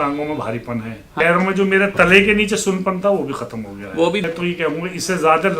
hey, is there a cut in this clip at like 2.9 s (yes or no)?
no